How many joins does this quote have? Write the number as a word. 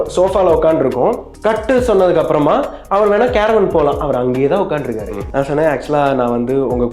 two